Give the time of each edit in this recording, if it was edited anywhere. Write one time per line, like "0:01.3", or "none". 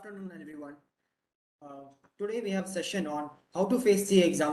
none